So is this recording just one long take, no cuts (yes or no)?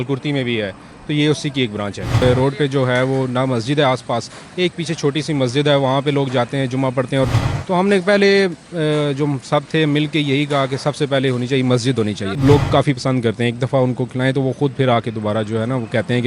no